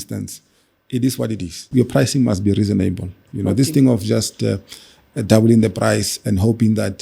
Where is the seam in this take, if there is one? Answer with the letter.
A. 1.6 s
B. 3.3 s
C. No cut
A